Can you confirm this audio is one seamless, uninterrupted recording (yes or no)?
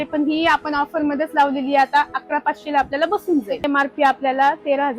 no